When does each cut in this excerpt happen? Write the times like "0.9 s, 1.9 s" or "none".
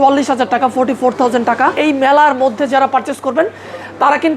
1.8 s